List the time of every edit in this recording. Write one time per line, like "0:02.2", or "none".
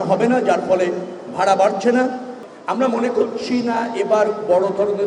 0:02.3